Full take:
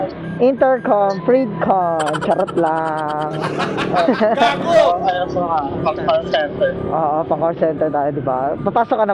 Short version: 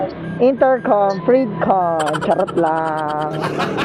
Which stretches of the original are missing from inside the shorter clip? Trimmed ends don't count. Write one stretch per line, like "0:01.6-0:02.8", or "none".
none

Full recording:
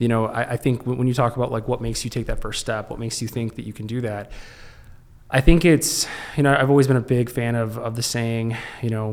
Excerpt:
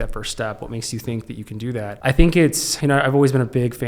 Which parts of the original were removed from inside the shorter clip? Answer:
0:04.2-0:05.2
0:06.0-0:06.2

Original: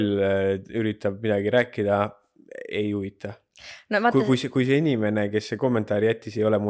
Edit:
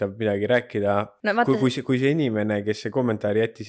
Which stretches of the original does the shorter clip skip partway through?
0:02.2-0:03.8

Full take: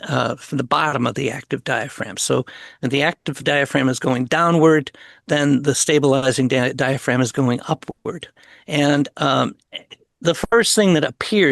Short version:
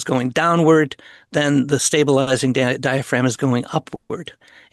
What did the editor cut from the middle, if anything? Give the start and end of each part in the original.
none

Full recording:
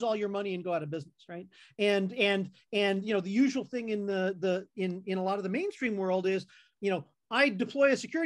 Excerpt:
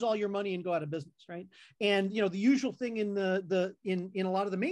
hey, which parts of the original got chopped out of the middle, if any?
0:01.6-0:02.6

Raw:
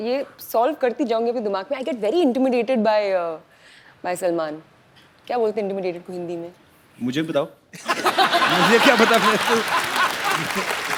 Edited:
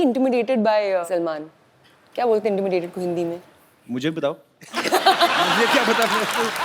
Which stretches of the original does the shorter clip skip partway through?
0:03.3-0:04.2

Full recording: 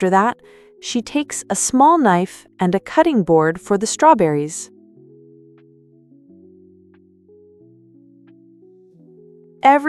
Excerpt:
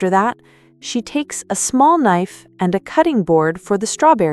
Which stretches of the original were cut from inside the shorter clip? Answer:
none

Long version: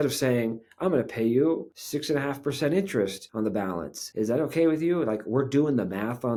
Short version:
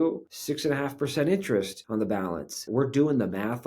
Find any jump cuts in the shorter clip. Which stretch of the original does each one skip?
0:04.1-0:05.2

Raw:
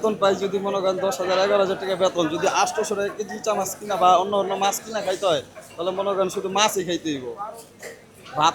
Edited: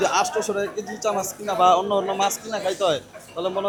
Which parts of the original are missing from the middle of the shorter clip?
none

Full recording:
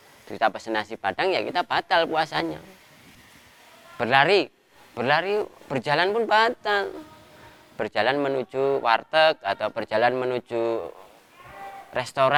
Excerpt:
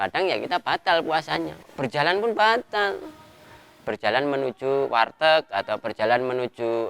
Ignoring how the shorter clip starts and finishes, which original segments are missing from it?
0:02.7-0:05.6

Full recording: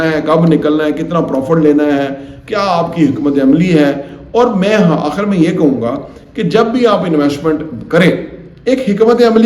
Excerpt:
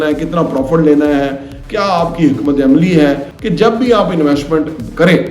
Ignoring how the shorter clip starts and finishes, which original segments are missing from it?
0:04.1-0:06.3

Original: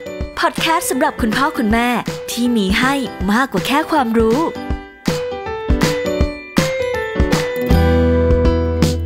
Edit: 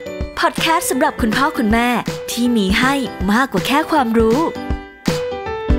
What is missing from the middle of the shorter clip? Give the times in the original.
none

